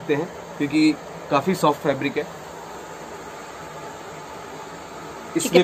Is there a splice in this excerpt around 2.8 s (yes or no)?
no